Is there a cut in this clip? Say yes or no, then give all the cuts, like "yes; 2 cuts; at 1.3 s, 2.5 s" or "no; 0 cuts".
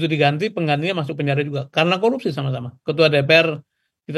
no; 0 cuts